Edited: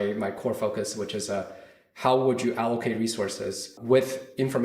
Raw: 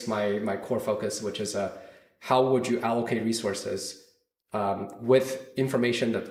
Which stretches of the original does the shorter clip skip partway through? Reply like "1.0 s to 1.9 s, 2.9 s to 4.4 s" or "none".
4.0 s to 4.9 s